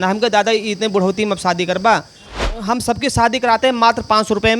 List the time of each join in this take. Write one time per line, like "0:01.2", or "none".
0:02.4